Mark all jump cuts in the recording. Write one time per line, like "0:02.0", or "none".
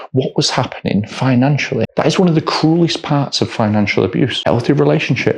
0:01.9
0:04.4